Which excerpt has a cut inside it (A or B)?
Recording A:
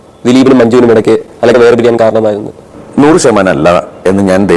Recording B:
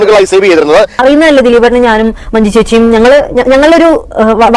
B